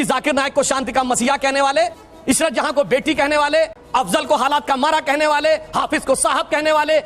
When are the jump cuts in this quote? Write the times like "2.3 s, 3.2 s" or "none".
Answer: 2.1 s, 3.8 s